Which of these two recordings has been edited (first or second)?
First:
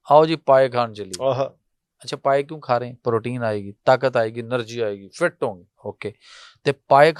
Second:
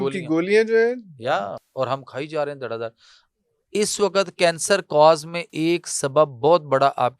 second